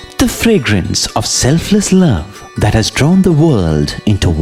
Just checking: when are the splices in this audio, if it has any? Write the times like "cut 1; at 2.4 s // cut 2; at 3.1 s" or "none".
none

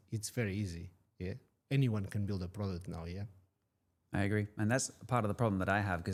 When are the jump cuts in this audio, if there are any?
none

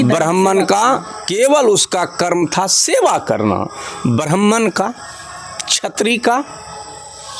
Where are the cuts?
none

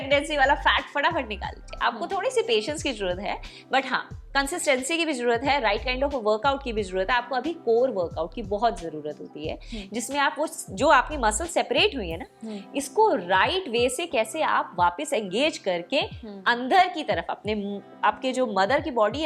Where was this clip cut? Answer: none

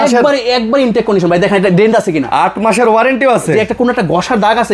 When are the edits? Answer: none

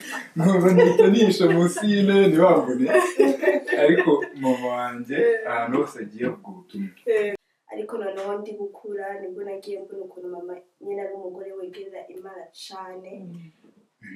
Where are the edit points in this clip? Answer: cut 1; at 7.5 s

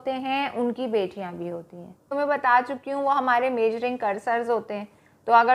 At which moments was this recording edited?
cut 1; at 2.1 s

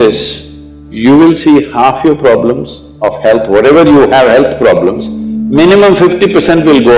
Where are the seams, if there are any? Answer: none

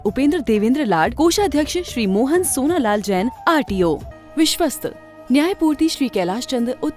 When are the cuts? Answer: cut 1; at 4.1 s

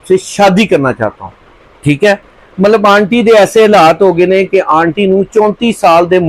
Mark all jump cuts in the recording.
none

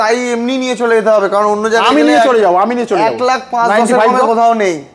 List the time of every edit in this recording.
none

